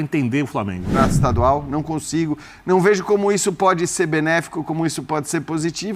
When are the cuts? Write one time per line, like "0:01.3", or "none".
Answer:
0:01.2